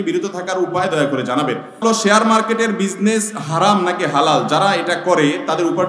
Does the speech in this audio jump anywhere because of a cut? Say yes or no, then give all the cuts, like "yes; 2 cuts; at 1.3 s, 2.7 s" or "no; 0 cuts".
yes; 1 cut; at 1.8 s